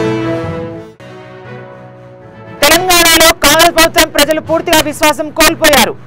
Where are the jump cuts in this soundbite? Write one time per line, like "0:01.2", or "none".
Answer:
0:02.4